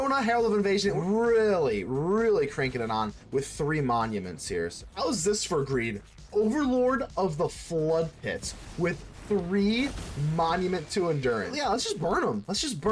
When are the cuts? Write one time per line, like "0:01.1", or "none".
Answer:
0:01.0
0:04.8
0:11.5